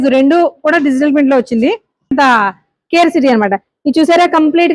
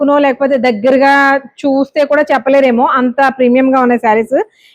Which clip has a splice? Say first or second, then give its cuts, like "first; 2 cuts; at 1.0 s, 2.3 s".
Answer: first; 1 cut; at 2.1 s